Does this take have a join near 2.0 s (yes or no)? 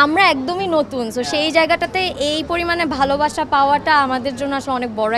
no